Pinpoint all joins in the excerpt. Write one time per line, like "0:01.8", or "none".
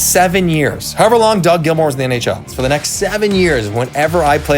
0:02.5